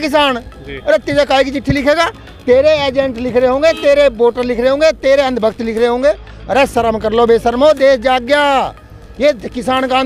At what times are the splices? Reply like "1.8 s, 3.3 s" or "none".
none